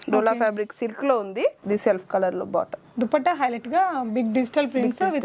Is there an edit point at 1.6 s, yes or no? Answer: no